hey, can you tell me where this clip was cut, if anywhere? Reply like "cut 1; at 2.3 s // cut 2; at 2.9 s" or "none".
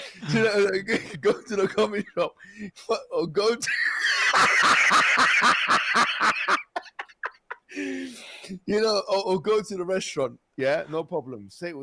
cut 1; at 10.4 s